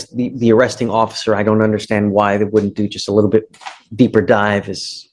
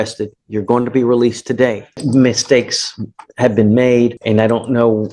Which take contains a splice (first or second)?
second